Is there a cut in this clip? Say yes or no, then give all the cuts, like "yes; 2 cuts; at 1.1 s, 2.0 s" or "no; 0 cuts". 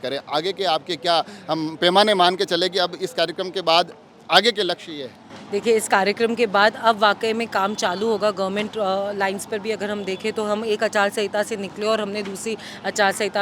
no; 0 cuts